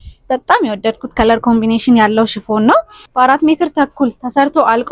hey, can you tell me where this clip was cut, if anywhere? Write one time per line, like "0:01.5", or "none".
0:03.0